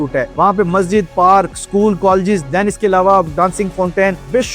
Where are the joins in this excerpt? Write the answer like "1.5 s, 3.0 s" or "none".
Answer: none